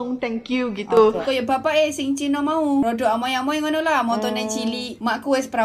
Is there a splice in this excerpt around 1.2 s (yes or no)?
yes